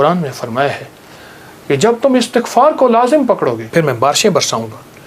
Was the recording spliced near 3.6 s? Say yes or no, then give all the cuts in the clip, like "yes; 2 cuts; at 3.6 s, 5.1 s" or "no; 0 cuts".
yes; 1 cut; at 3.6 s